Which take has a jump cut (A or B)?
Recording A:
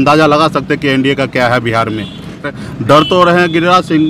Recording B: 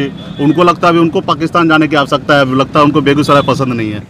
A